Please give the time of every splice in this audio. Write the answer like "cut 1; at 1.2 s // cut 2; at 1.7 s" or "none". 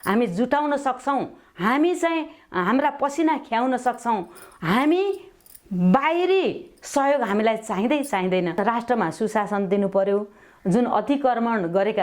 cut 1; at 8.6 s